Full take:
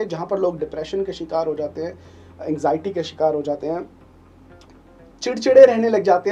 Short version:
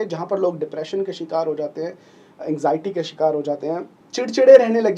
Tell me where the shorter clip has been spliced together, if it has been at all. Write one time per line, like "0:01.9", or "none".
0:04.0